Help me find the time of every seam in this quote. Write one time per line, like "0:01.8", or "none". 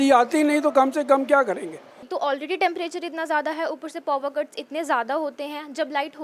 0:02.1